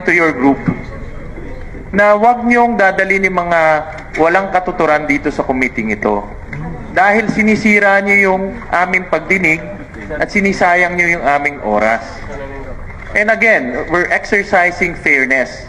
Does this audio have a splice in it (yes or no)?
no